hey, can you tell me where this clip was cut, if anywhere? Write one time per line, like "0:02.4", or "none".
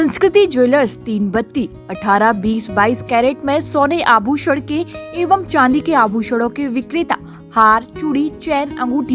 none